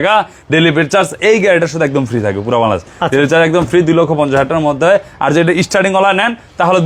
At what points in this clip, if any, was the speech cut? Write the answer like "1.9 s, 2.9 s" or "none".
none